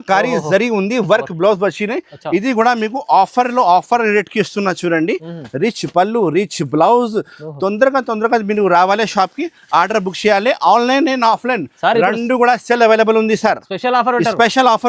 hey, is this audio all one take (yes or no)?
yes